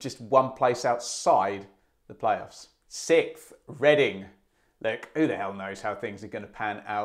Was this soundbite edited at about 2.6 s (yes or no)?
no